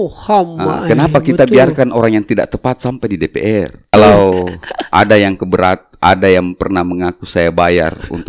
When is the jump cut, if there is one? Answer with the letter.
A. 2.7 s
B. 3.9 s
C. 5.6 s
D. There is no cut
B